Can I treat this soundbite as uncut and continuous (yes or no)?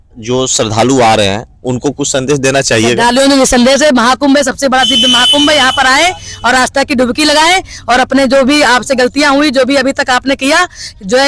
yes